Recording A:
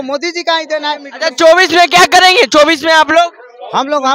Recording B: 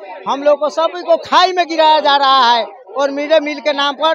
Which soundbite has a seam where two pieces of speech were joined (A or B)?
A